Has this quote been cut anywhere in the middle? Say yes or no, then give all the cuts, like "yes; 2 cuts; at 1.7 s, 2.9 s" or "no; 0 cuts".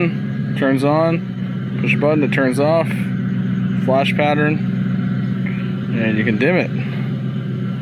no; 0 cuts